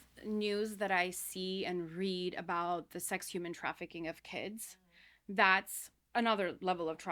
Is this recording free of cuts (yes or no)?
yes